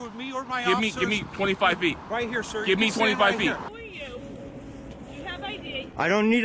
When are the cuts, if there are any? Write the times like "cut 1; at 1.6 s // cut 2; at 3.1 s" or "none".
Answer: cut 1; at 3.7 s